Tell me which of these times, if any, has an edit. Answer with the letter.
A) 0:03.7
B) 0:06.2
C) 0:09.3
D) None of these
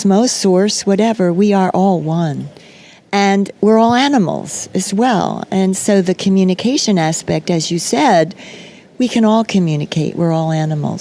B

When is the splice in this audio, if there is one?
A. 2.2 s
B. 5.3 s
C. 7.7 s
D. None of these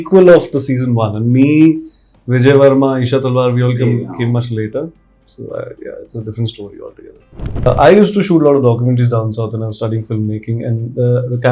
C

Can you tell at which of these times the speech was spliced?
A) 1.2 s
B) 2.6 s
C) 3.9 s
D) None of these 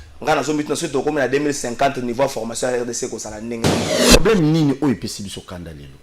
C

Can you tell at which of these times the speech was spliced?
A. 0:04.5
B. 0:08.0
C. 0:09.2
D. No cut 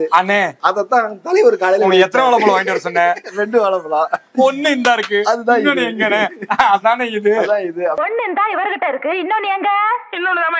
B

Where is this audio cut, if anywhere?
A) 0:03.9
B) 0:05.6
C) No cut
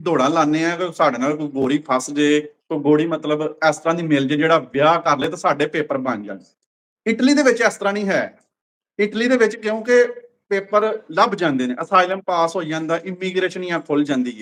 C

